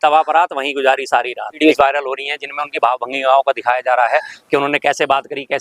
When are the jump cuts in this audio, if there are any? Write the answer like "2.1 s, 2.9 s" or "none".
1.6 s